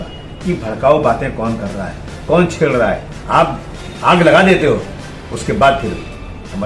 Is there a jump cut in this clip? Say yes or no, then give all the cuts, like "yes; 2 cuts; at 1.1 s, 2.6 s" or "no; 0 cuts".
no; 0 cuts